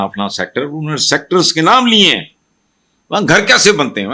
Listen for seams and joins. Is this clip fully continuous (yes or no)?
yes